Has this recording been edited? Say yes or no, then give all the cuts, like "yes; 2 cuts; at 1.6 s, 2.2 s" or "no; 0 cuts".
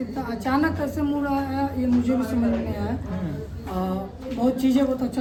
no; 0 cuts